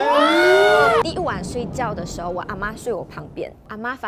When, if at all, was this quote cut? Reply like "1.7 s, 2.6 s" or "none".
1.0 s